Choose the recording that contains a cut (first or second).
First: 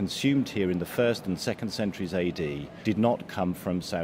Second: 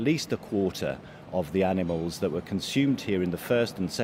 first